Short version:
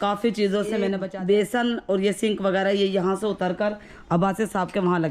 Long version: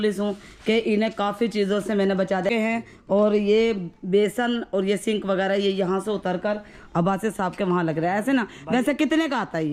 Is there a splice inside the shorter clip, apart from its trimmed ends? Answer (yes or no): yes